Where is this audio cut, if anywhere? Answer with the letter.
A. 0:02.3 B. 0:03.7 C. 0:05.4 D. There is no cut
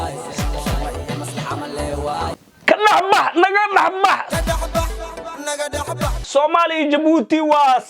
A